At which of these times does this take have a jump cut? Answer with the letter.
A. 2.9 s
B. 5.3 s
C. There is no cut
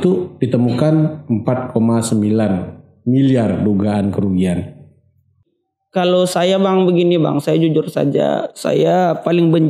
B